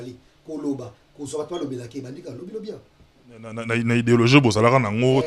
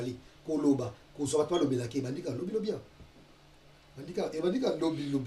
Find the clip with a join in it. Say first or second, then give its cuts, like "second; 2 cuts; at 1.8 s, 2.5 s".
first; 1 cut; at 3.5 s